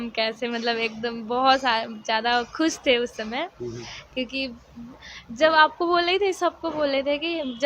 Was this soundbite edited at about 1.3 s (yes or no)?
no